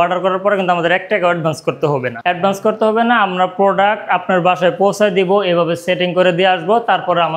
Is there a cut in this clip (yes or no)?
no